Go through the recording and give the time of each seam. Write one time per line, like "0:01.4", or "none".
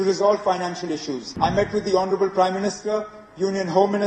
0:01.2